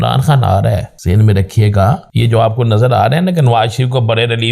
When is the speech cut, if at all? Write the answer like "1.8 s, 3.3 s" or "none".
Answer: 0.9 s, 2.1 s